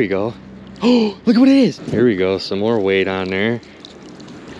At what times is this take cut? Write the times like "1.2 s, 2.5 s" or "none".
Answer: 1.8 s